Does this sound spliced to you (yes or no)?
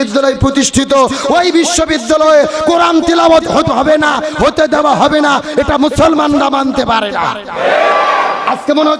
no